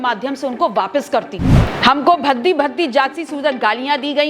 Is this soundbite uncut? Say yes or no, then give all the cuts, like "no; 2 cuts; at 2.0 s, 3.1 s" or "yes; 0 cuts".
no; 1 cut; at 1.5 s